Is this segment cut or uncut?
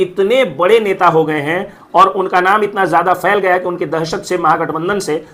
uncut